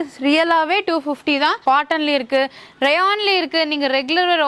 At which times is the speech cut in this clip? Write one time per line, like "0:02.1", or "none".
0:01.6